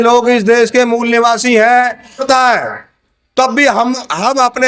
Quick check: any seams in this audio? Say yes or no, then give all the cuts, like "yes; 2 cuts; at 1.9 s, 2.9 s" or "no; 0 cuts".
yes; 1 cut; at 2.2 s